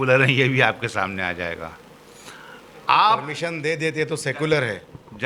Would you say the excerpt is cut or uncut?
cut